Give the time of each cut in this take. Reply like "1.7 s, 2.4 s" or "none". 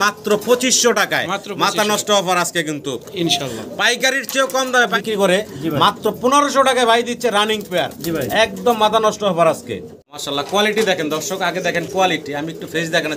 4.9 s, 10.0 s